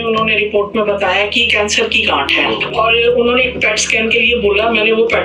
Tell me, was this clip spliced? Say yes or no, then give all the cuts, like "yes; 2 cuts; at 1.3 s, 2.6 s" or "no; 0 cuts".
yes; 1 cut; at 1.5 s